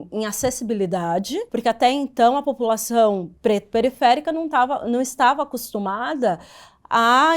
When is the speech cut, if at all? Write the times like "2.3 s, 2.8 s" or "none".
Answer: 1.5 s

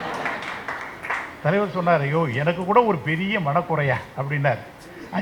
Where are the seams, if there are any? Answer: none

